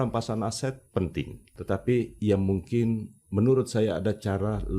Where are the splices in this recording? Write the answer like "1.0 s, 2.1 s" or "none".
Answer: 1.5 s

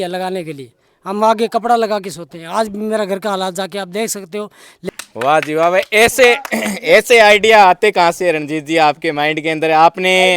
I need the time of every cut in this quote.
4.7 s

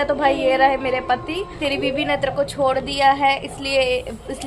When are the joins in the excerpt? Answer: 1.5 s

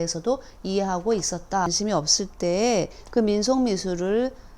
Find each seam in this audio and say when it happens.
1.7 s

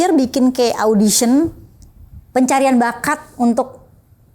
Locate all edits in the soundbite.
none

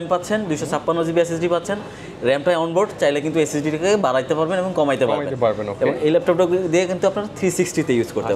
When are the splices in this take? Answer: none

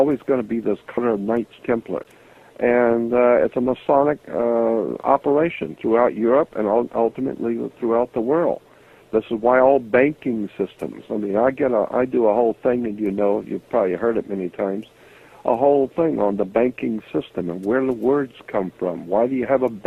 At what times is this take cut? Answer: none

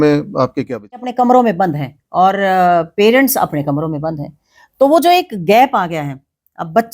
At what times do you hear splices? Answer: 1.1 s

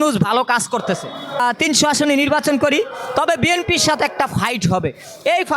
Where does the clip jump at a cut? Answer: 1.4 s

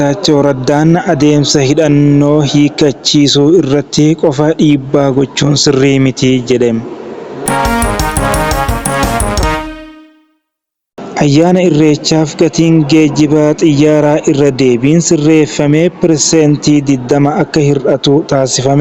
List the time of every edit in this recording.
7.4 s, 10.9 s

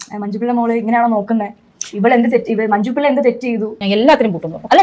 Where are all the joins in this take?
3.7 s

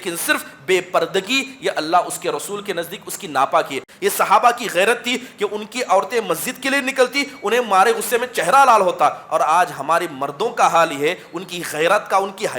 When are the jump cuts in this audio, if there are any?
3.8 s

